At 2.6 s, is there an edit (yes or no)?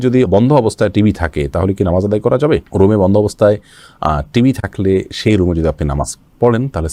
no